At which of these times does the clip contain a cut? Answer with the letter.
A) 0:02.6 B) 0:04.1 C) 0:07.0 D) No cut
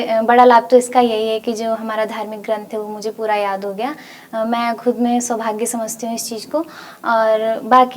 D